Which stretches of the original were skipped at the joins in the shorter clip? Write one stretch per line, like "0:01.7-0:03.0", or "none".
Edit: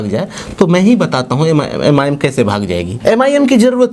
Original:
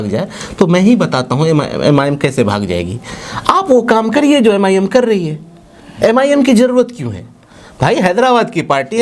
0:02.9-0:05.9